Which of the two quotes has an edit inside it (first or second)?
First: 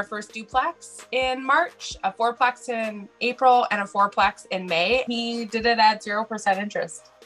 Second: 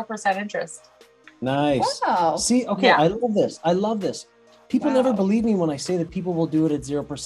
first